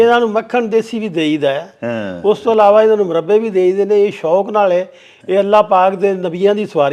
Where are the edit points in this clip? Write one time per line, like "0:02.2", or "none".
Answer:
none